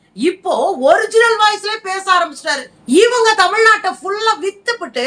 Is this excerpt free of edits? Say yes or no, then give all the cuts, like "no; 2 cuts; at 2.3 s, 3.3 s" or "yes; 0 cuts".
no; 1 cut; at 2.7 s